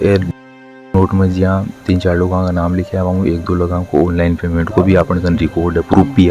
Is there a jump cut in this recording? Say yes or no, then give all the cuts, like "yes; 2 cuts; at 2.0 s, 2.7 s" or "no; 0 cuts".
no; 0 cuts